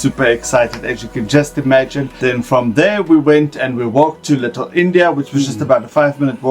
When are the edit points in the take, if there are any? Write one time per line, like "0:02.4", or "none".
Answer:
0:02.2